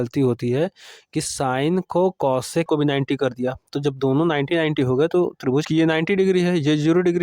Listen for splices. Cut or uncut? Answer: cut